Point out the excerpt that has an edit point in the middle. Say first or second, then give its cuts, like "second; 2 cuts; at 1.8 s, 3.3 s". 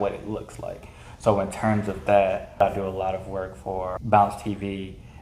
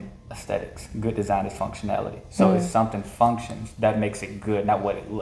first; 2 cuts; at 2.6 s, 4.0 s